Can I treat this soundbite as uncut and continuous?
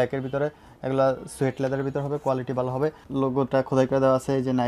no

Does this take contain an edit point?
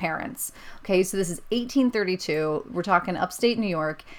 no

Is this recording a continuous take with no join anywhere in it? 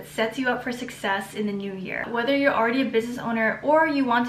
no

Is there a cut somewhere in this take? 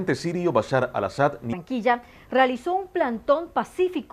no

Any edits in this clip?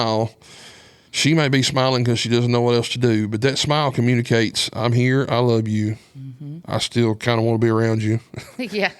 no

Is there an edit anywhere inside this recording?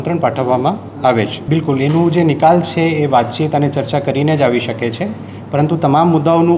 yes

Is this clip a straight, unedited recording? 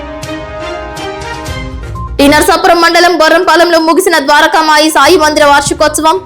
no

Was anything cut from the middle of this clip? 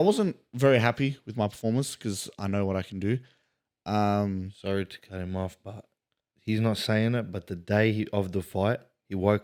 no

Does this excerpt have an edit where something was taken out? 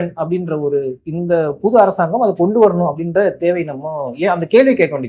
no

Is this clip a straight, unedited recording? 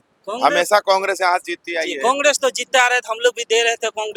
yes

